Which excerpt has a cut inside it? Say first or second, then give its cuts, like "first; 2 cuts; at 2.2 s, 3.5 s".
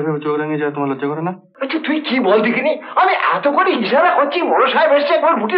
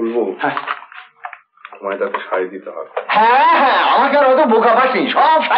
first; 1 cut; at 1.5 s